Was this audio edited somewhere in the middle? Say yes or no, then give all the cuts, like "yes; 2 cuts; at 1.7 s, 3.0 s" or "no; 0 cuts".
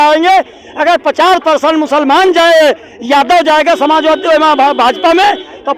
no; 0 cuts